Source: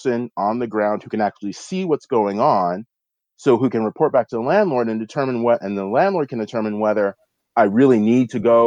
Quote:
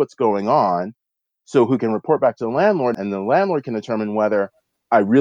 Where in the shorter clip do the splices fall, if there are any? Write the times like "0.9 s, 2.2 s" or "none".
3.0 s